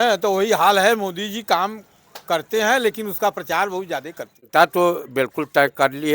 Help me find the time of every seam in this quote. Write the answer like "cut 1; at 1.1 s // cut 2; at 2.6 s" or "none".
cut 1; at 4.5 s